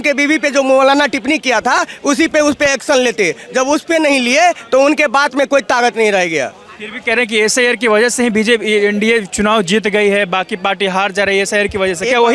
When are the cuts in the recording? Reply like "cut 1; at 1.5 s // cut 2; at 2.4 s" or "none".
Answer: none